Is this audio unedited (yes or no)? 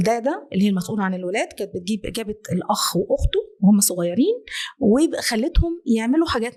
yes